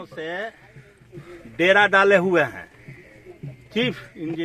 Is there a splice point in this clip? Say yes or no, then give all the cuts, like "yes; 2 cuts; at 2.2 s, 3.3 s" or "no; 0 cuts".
no; 0 cuts